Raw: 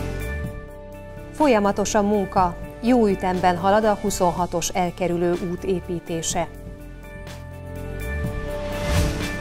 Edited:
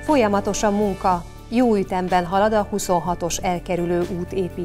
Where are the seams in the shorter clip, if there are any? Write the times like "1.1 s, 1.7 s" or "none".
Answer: none